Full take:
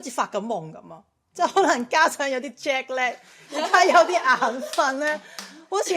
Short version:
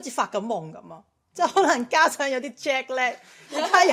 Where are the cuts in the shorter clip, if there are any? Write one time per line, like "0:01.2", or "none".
none